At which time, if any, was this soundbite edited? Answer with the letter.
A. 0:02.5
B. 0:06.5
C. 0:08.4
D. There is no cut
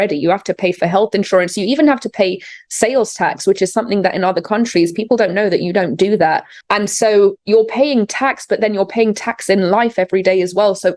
B